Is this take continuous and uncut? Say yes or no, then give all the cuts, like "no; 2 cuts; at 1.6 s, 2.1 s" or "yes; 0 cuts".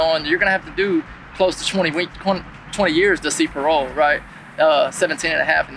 yes; 0 cuts